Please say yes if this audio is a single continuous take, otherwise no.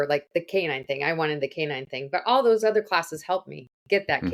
yes